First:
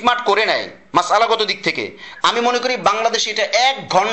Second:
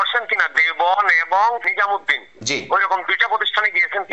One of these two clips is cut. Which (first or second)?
second